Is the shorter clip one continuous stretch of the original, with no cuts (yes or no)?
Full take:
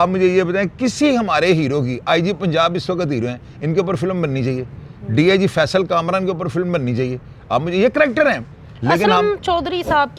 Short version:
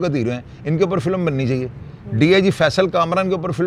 yes